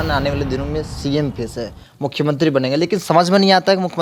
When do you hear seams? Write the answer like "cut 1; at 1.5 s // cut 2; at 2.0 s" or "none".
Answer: none